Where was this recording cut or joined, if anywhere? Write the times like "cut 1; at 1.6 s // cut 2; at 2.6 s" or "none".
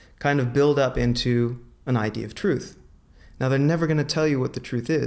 none